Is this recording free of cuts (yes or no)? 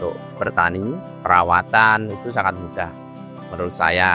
no